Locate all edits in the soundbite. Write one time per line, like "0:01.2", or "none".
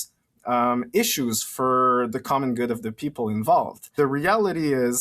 0:03.9